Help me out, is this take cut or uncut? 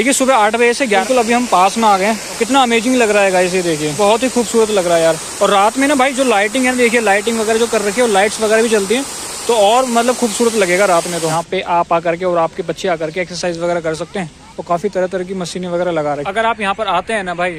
cut